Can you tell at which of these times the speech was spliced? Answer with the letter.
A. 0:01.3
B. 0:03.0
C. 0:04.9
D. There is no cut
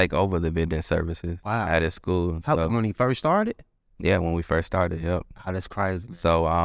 A